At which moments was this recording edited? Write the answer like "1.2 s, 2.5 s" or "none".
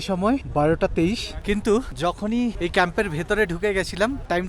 none